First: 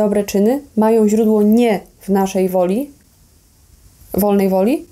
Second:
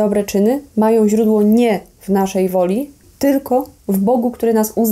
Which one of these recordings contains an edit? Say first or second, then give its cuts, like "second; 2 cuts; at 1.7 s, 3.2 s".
second; 1 cut; at 3.1 s